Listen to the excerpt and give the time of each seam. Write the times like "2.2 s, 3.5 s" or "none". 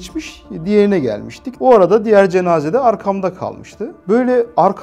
1.4 s, 4.0 s